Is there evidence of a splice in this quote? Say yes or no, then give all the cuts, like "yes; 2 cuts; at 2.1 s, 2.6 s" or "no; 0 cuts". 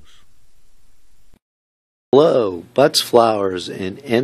no; 0 cuts